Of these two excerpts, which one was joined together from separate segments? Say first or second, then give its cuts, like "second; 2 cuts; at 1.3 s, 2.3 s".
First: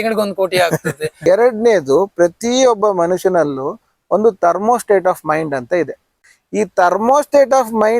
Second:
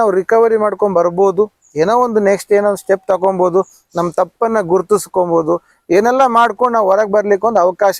first; 2 cuts; at 1.2 s, 6.1 s